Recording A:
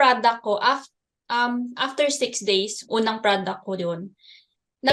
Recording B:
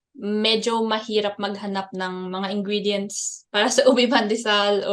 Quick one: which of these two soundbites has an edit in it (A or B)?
A